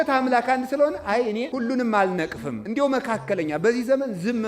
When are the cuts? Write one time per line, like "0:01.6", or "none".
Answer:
0:01.5
0:02.6